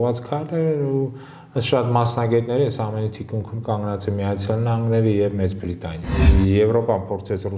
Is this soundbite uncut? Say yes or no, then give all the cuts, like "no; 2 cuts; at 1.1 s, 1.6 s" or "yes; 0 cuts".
no; 1 cut; at 6.2 s